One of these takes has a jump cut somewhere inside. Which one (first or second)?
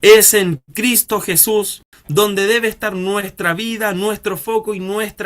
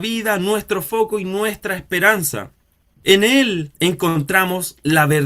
first